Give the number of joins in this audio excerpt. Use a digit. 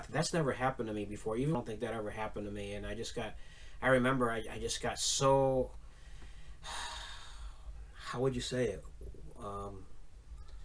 1